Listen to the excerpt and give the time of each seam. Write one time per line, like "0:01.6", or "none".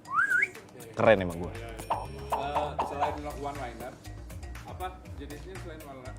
none